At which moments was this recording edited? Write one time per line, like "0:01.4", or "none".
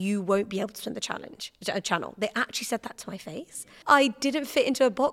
0:03.7